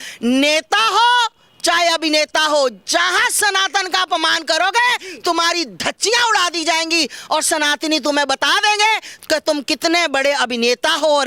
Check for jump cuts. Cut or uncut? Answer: uncut